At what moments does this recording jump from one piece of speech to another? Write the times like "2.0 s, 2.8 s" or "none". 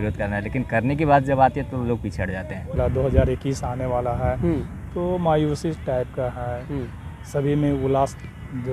2.8 s